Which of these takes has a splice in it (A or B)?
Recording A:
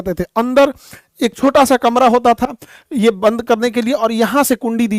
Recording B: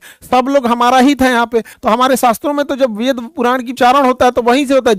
B